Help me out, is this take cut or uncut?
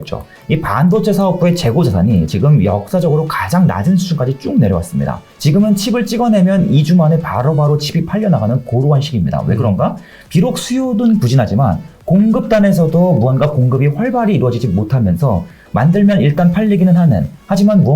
cut